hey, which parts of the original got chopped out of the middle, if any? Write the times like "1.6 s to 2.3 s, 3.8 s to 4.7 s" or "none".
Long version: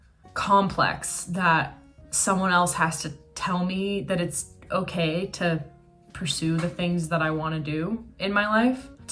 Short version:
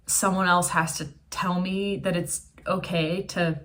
none

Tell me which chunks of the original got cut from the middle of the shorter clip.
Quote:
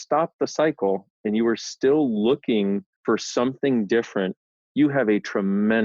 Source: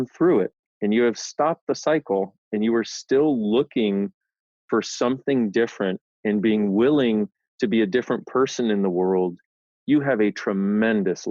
4.2 s to 4.5 s, 6.1 s to 9.5 s

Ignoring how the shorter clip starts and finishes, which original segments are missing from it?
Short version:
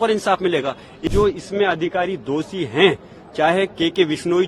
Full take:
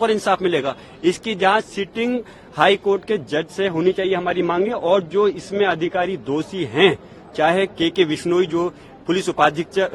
1.0 s to 5.0 s

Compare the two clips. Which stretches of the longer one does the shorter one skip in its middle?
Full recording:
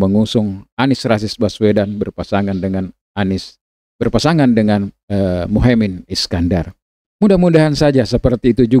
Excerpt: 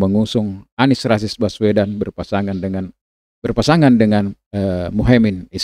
3.0 s to 3.6 s

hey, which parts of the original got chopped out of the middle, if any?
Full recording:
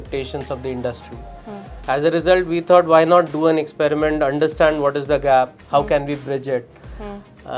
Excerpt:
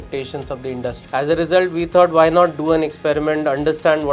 1.0 s to 1.8 s

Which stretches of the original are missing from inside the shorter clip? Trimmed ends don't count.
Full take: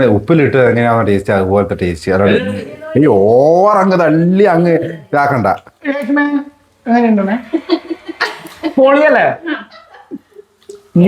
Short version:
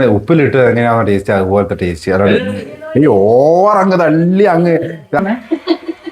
5.2 s to 7.2 s

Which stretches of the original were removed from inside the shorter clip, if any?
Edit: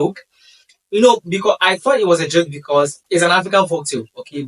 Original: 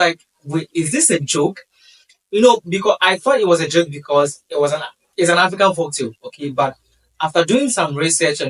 4.4 s to 5.1 s

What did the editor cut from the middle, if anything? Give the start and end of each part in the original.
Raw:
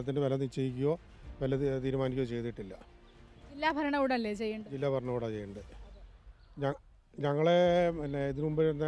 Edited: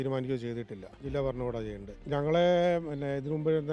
2.9 s to 4.7 s, 5.6 s to 7.0 s

